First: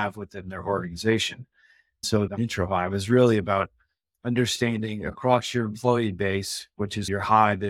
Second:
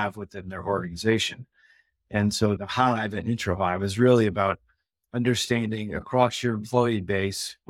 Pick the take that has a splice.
first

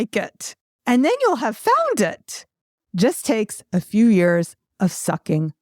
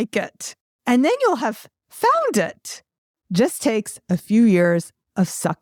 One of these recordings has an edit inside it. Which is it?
first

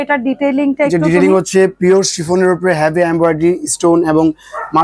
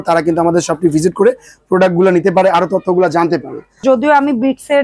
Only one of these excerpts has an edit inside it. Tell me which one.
second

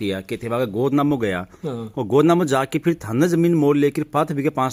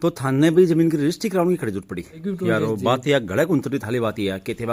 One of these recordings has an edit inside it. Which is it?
second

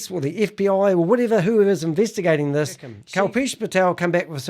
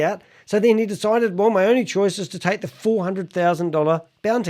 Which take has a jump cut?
first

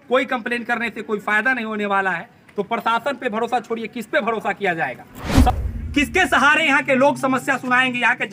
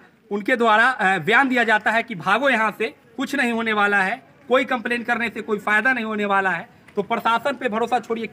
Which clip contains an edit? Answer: first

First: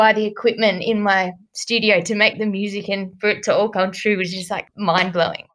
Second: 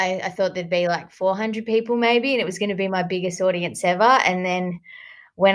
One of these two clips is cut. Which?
first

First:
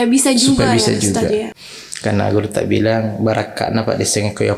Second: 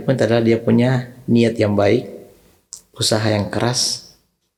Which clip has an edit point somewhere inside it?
first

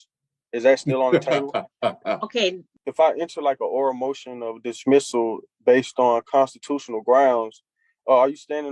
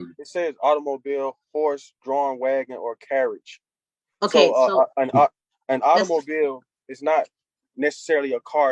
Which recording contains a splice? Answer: first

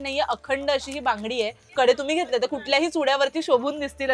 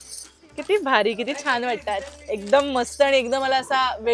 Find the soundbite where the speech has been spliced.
first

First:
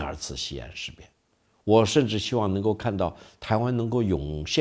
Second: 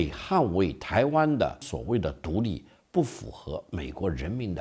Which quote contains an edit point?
second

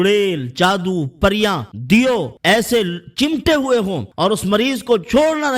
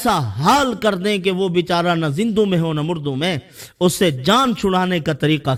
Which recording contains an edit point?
first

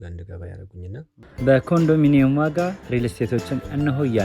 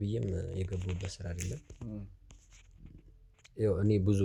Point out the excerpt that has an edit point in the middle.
first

